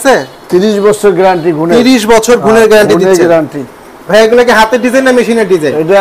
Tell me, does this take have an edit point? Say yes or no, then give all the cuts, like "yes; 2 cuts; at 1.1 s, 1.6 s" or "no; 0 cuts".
no; 0 cuts